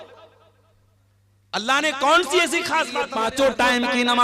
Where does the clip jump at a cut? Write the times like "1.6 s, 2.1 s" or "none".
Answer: 3.1 s

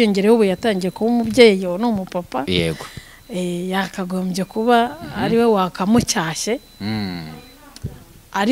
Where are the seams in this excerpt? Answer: none

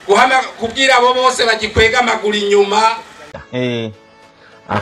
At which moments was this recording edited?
3.3 s

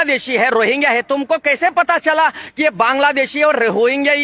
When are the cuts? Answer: none

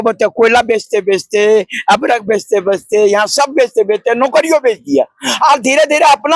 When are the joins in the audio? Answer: none

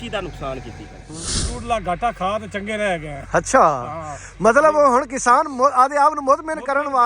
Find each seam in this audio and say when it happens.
1.0 s

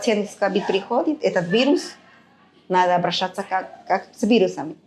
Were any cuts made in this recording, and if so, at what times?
none

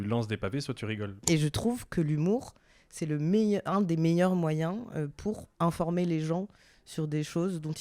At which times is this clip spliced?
1.2 s, 5.5 s

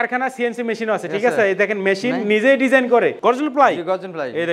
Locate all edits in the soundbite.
3.2 s

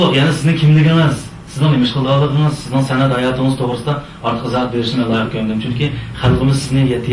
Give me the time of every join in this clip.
4.9 s

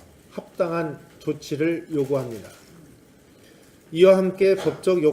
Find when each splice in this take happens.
none

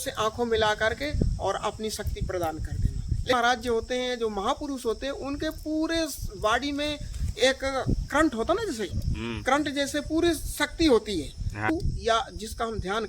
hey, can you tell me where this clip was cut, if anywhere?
3.3 s, 11.7 s

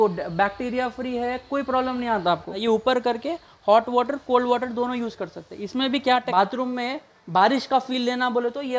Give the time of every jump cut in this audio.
2.6 s, 6.3 s

